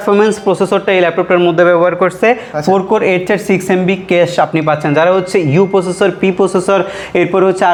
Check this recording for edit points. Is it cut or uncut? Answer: uncut